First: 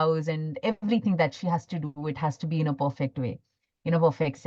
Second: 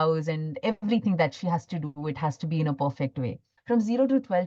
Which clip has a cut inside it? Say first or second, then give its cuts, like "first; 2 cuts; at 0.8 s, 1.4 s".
second; 1 cut; at 3.5 s